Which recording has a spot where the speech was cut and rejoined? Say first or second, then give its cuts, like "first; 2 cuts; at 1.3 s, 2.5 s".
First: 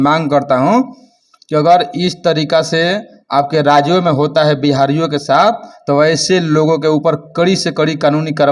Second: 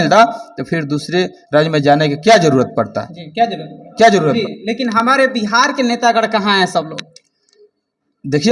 second; 1 cut; at 4.4 s